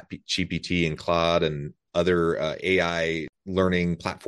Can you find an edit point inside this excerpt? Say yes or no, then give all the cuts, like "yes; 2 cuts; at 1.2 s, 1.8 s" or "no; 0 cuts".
yes; 1 cut; at 3.3 s